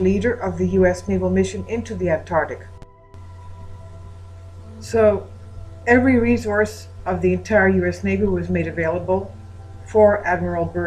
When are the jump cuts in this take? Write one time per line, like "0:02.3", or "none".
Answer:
0:07.7